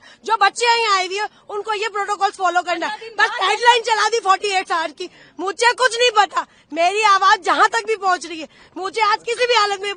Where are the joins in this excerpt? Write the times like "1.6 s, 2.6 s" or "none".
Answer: none